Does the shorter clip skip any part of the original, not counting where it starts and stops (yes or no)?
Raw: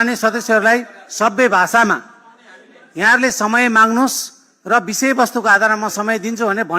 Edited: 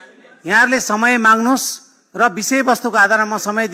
no